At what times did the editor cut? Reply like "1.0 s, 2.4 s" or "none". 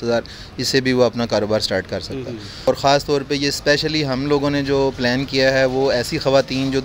2.7 s